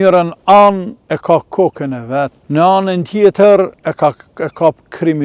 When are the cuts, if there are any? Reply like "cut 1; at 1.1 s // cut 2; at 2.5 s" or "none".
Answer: cut 1; at 0.9 s // cut 2; at 2.4 s // cut 3; at 3.8 s